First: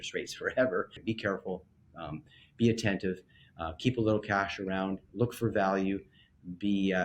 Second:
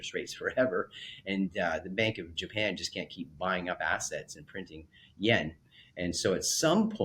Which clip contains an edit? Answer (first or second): first